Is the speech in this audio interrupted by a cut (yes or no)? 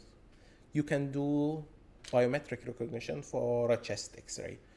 yes